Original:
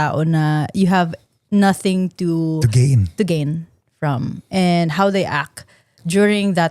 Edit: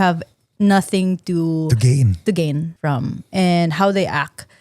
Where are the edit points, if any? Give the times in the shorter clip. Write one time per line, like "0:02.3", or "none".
0:02.7